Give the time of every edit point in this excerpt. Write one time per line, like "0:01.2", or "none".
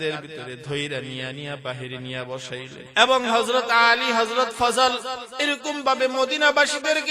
0:02.8